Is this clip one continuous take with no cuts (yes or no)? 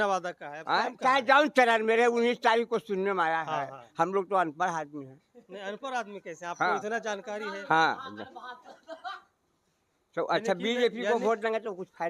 yes